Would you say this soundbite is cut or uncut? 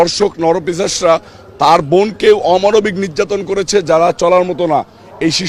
uncut